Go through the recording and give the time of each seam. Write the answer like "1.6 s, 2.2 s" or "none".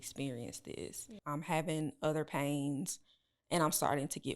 1.1 s